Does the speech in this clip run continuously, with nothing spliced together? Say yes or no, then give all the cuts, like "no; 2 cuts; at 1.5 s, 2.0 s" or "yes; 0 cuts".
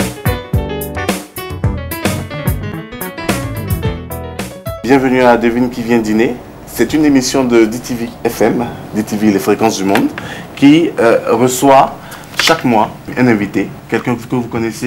no; 2 cuts; at 4.7 s, 13.1 s